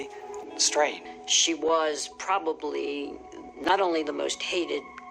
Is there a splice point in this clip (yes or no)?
yes